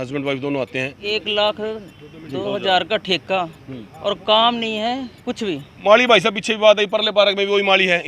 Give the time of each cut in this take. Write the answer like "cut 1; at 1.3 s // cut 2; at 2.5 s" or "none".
cut 1; at 1.0 s // cut 2; at 5.7 s